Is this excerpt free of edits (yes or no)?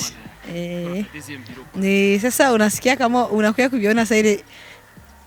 yes